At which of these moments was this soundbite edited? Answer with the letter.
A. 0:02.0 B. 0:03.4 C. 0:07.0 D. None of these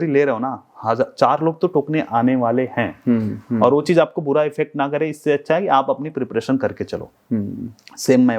D